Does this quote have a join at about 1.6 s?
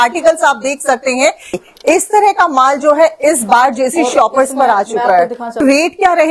yes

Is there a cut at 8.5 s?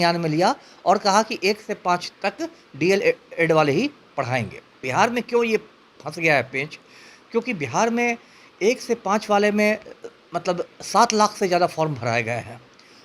no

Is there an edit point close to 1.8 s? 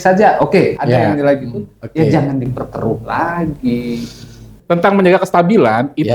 no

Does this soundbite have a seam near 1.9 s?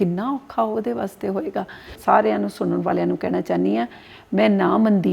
yes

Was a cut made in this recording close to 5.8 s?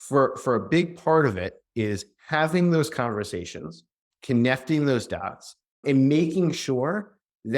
yes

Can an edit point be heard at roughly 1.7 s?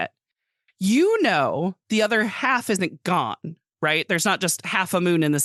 no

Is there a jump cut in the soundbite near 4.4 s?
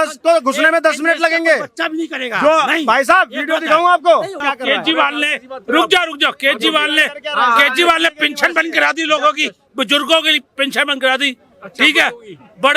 yes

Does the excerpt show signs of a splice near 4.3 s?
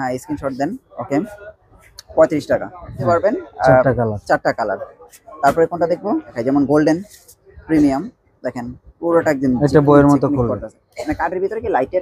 no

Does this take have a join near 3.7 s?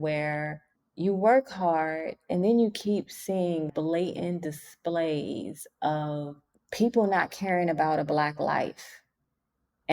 yes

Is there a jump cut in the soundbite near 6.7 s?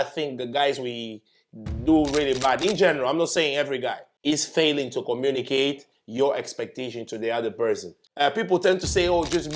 no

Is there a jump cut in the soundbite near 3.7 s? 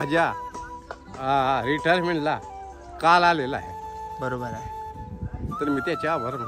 no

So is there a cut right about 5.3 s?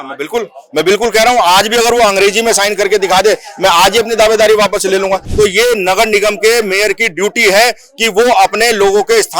yes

